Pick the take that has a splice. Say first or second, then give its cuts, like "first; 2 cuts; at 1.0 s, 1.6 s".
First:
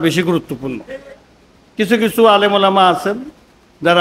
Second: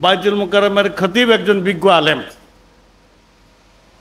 first; 1 cut; at 1.2 s